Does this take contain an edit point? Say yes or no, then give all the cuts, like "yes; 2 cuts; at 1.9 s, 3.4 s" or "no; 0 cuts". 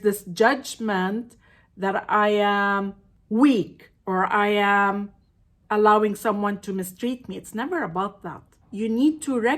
yes; 1 cut; at 8.5 s